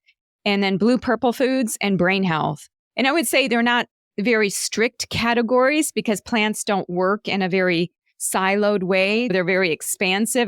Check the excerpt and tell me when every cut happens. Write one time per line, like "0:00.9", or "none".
0:09.3